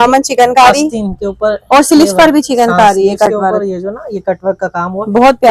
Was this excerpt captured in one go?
yes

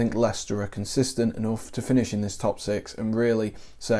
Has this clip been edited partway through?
no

